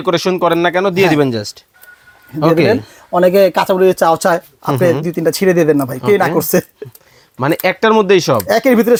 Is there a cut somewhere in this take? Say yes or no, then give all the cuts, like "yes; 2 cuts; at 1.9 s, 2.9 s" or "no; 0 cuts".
no; 0 cuts